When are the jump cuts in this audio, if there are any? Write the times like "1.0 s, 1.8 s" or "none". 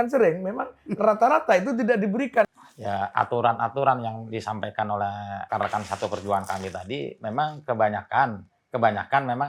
2.5 s, 5.5 s

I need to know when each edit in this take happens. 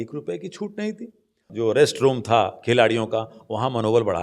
1.4 s

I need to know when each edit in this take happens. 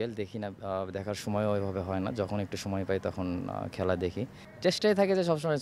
4.4 s

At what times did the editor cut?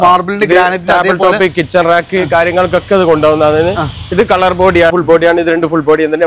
4.9 s

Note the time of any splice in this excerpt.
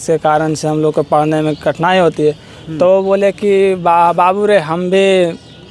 none

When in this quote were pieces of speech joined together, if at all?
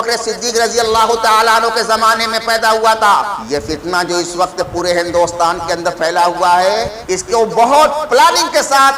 3.3 s, 6.9 s

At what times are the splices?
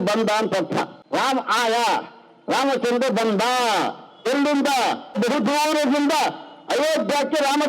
1.0 s, 5.2 s

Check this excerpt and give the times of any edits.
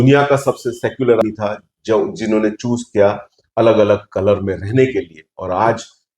1.2 s

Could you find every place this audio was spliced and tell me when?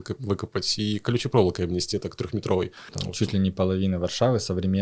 3.0 s

